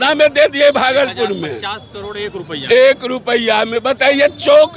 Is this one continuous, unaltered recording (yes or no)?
yes